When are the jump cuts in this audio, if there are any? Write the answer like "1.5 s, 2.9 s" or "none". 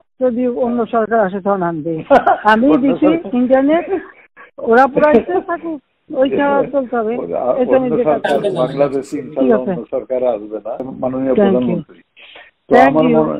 10.8 s